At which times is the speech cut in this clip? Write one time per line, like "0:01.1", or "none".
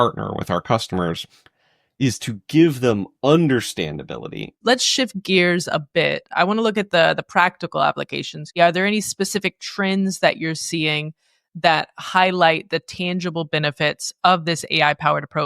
0:04.5
0:08.6